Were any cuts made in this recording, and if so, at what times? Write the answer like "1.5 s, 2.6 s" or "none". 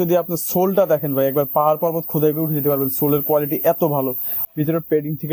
4.4 s